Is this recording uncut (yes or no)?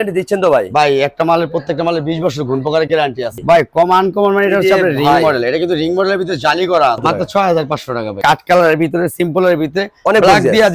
no